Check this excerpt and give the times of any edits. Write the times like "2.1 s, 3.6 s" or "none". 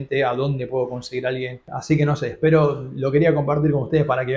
1.7 s

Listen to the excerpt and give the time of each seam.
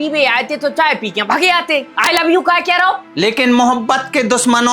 3.1 s

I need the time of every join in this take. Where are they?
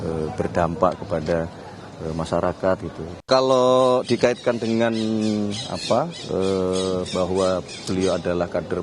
3.3 s

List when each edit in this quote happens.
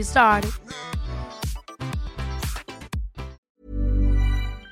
3.4 s

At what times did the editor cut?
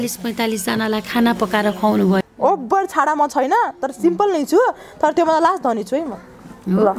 2.2 s

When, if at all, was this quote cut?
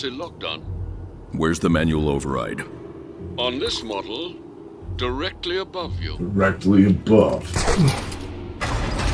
none

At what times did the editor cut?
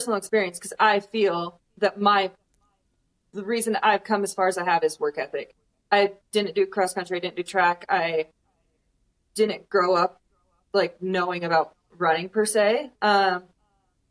none

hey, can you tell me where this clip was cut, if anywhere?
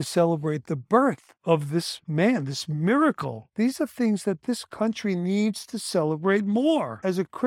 1.5 s, 3.5 s

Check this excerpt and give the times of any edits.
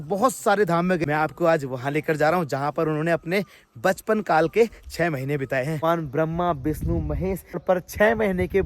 1.0 s, 5.8 s, 7.6 s

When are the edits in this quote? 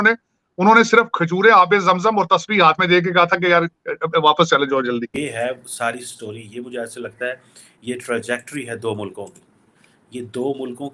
5.1 s

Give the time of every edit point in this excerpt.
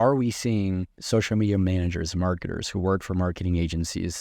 0.9 s

